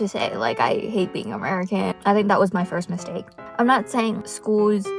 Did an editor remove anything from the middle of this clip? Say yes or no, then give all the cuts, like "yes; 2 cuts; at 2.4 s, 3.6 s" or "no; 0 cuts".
yes; 2 cuts; at 1.9 s, 3.4 s